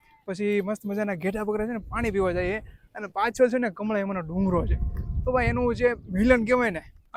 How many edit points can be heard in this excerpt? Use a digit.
0